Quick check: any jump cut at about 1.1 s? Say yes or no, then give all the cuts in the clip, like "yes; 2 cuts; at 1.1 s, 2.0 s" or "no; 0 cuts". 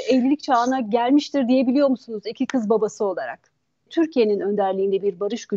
no; 1 cut; at 3.9 s